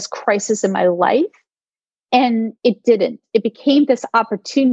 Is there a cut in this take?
no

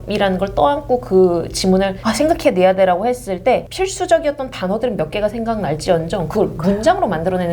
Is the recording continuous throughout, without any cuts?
no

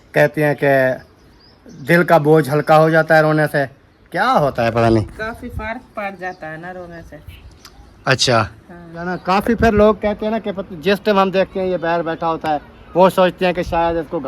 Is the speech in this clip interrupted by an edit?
yes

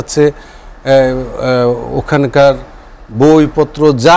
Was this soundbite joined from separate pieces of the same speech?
no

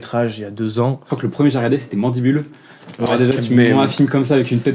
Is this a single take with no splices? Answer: no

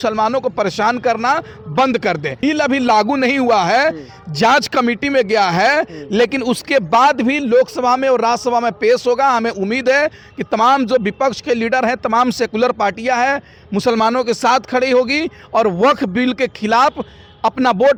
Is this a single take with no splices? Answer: yes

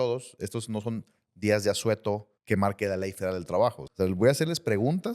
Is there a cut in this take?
yes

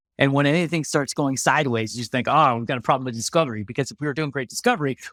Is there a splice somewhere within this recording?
no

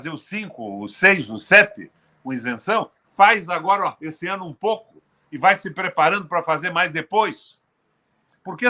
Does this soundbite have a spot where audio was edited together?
no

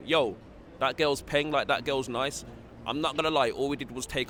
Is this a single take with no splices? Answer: yes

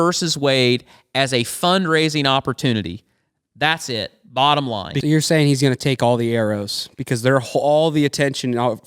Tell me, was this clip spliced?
yes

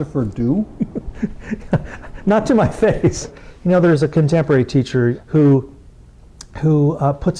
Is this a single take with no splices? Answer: no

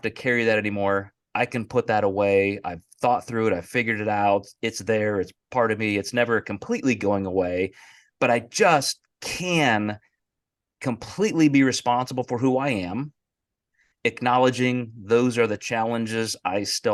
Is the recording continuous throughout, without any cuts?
yes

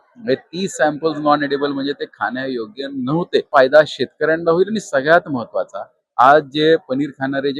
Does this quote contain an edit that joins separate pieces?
yes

